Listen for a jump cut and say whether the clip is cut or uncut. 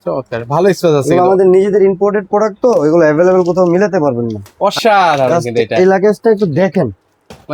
cut